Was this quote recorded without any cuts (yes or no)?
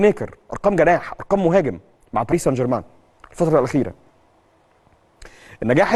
yes